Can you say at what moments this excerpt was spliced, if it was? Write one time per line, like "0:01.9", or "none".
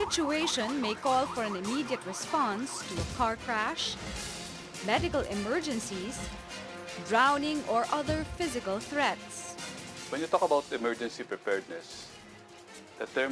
0:07.3